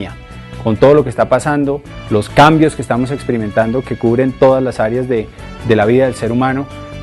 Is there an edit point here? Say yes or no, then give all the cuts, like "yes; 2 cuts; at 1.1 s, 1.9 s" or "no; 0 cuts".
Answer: yes; 1 cut; at 1.0 s